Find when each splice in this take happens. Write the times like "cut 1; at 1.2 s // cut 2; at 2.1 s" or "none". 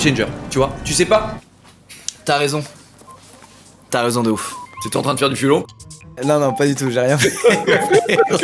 cut 1; at 1.3 s // cut 2; at 6.2 s